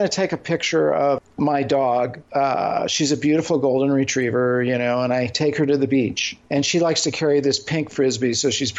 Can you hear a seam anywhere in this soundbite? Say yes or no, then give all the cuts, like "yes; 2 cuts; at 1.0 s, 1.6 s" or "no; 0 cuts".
yes; 3 cuts; at 1.2 s, 2.2 s, 6.3 s